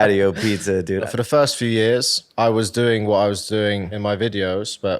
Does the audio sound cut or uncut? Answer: cut